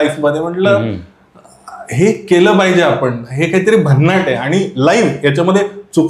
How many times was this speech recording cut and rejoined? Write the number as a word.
zero